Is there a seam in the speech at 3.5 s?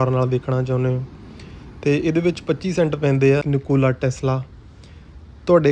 yes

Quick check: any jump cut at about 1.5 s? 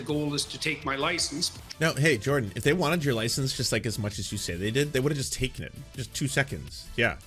yes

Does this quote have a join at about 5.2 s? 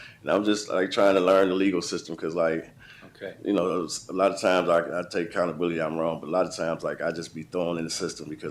yes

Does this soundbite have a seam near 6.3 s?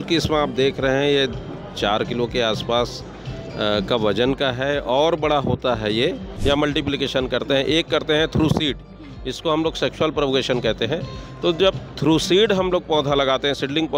yes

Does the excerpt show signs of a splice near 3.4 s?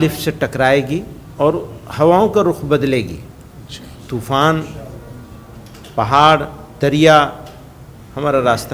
no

